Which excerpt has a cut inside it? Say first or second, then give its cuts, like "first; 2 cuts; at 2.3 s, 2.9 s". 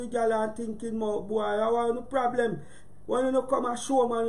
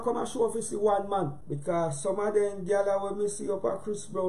second; 1 cut; at 1.5 s